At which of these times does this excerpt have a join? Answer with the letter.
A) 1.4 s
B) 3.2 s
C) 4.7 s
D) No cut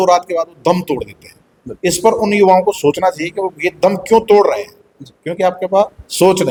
D